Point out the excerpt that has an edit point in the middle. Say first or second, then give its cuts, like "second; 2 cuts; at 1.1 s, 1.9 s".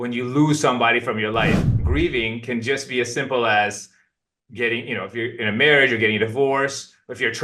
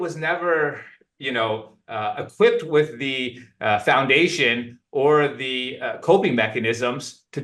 first; 1 cut; at 1.6 s